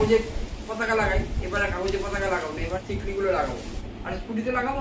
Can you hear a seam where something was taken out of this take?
yes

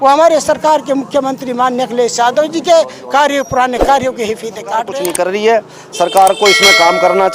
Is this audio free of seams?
no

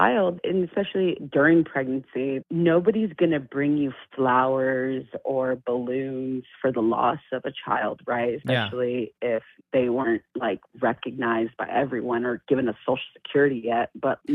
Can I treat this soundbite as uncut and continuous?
no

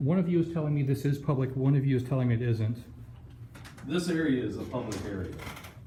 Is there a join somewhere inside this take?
no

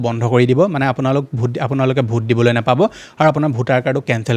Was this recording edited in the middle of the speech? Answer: no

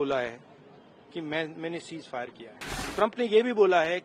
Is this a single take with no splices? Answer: no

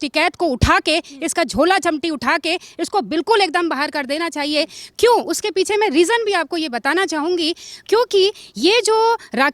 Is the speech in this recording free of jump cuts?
yes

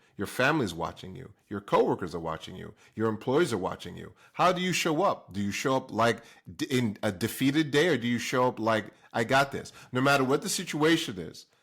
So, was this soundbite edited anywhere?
no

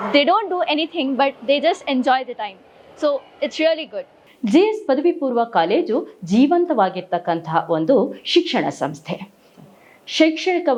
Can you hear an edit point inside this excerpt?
no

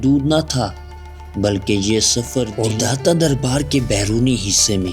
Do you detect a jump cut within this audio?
yes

